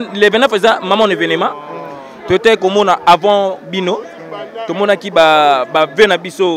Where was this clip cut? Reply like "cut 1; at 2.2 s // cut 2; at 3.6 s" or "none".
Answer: none